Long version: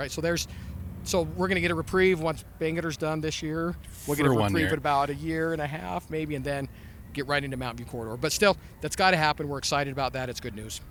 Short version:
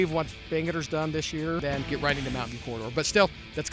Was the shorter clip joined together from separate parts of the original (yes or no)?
yes